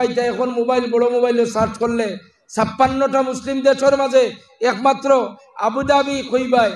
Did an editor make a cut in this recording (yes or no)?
no